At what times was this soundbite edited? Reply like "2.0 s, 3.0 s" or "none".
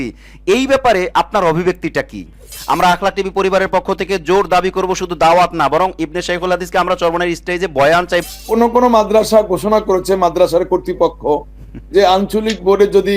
2.6 s, 8.2 s